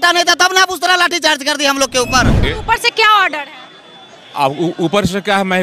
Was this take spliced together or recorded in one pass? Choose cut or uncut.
cut